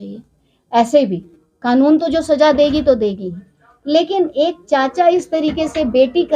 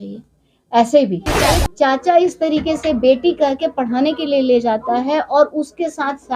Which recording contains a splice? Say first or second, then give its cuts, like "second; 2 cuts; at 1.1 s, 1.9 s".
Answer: second; 1 cut; at 1.5 s